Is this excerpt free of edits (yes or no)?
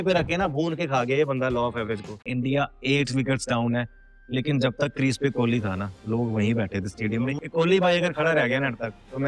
no